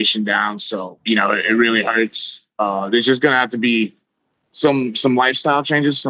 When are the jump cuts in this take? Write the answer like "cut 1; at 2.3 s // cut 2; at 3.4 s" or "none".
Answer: cut 1; at 0.9 s